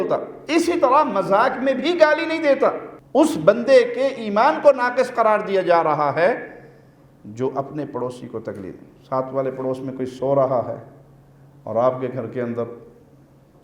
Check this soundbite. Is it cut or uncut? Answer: cut